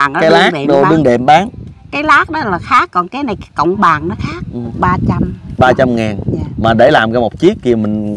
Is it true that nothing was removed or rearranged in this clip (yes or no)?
no